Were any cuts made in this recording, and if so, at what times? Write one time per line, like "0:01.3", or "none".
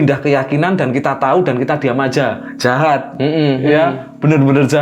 none